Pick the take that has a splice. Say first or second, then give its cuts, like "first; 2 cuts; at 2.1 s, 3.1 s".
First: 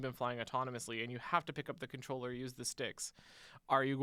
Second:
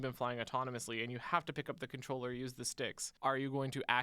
second; 1 cut; at 3.1 s